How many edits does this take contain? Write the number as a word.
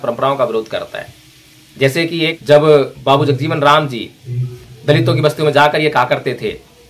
one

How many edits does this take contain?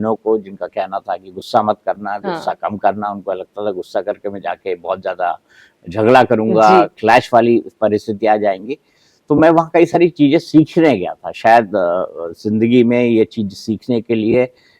zero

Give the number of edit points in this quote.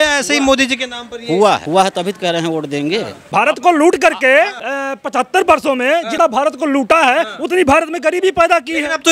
four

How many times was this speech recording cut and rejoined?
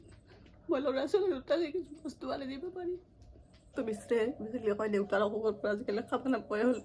one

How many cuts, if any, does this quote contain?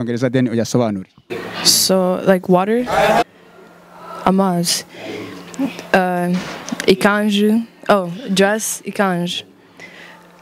one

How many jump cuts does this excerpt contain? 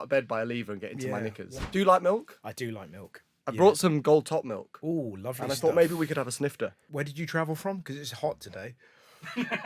two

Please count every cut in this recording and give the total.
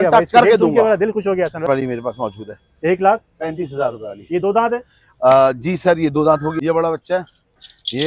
two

